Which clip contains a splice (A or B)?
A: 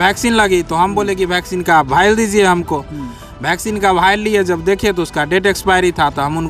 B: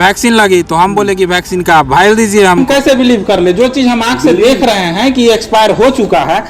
B